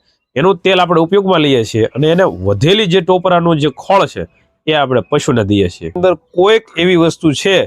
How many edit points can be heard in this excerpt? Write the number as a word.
one